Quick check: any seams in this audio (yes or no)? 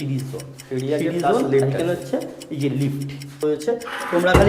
yes